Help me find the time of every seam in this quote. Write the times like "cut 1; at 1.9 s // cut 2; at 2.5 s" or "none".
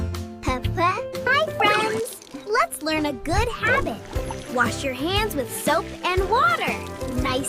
none